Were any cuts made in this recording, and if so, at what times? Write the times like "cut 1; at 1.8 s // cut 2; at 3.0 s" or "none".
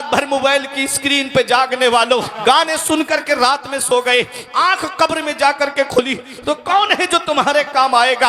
cut 1; at 2.3 s